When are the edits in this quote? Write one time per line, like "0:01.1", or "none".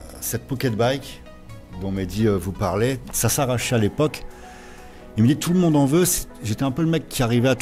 none